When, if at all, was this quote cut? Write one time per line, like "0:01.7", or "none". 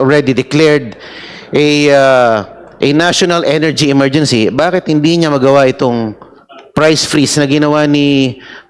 none